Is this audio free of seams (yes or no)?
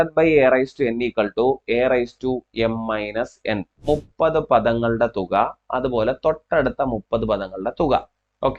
no